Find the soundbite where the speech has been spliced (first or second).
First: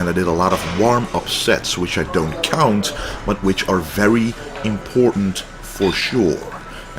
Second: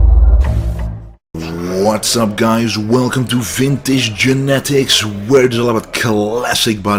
first